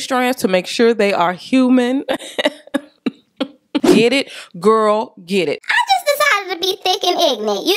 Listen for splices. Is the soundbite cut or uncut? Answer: cut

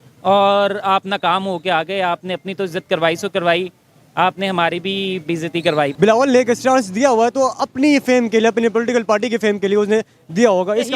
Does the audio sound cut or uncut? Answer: cut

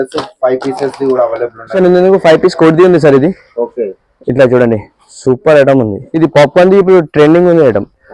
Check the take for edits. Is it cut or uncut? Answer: cut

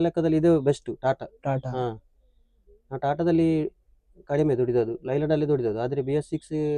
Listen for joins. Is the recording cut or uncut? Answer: uncut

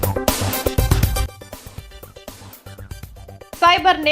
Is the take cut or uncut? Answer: cut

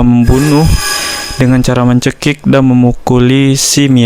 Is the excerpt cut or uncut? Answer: uncut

